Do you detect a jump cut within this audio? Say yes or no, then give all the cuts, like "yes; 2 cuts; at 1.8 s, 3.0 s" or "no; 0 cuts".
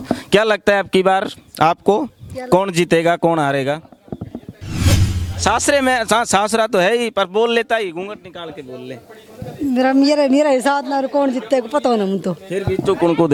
no; 0 cuts